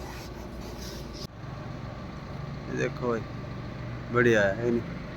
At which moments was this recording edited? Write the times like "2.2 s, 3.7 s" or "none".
1.3 s